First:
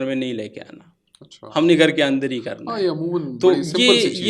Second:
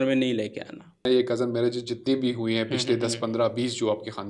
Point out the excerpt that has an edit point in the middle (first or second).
second